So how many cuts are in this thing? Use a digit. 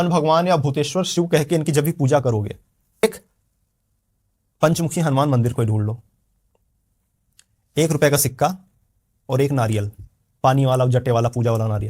1